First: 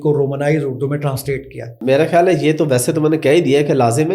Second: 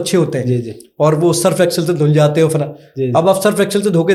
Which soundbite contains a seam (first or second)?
first